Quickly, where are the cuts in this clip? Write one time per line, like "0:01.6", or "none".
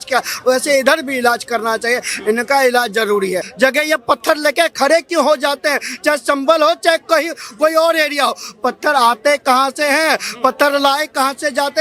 0:03.5